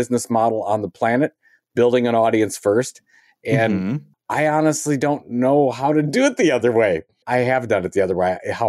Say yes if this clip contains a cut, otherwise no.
yes